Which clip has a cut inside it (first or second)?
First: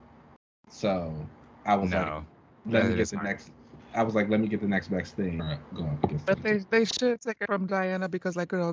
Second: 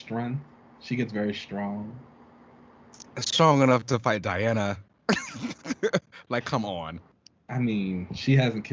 first